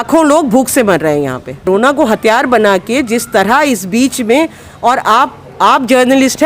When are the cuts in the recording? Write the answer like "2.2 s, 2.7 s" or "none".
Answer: 1.7 s